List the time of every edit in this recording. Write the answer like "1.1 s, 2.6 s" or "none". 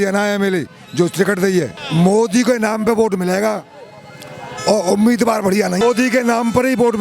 1.8 s, 5.8 s